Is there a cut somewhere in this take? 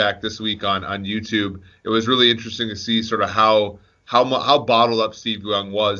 no; 0 cuts

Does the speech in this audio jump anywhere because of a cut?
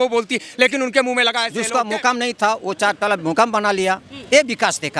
yes; 1 cut; at 1.6 s

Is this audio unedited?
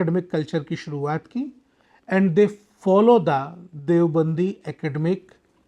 yes; 0 cuts

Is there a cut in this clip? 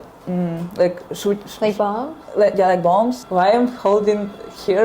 yes; 1 cut; at 3.2 s

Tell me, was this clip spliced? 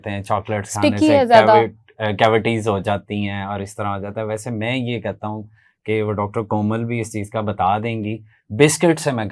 no; 0 cuts

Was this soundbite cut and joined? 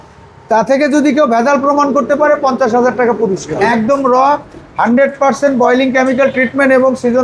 yes; 1 cut; at 3.5 s

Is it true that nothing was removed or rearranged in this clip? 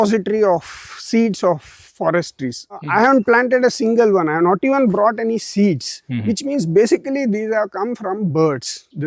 no; 1 cut; at 2.8 s

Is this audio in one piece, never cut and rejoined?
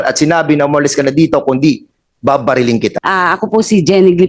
no; 1 cut; at 3.0 s

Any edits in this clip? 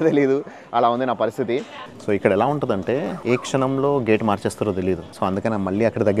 yes; 3 cuts; at 1.8 s, 3.1 s, 5.1 s

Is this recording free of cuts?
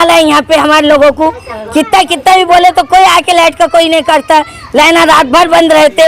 yes; 0 cuts

